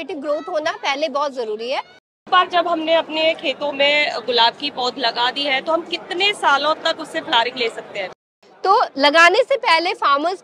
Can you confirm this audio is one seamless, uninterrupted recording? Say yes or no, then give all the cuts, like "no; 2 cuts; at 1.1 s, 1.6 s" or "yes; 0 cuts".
no; 2 cuts; at 2.2 s, 8.2 s